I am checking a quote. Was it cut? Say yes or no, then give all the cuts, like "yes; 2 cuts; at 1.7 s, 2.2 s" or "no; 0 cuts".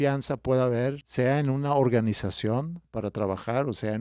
yes; 2 cuts; at 1.0 s, 2.8 s